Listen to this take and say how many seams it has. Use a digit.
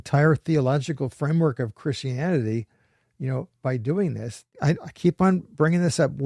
1